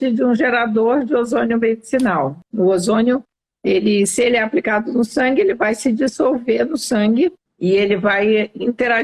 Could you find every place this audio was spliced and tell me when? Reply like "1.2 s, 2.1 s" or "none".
2.4 s, 7.5 s